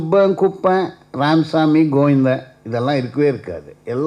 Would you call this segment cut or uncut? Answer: uncut